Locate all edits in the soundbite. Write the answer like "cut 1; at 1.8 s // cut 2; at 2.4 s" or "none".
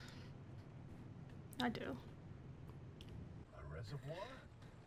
cut 1; at 3.4 s